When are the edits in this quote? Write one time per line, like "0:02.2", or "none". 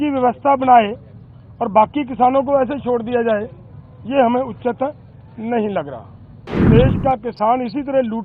0:06.6